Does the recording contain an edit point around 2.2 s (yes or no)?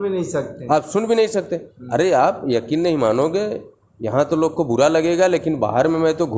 no